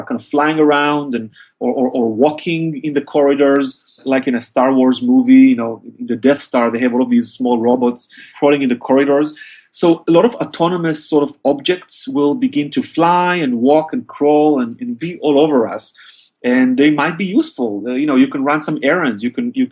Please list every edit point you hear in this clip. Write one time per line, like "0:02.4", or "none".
0:04.0
0:08.8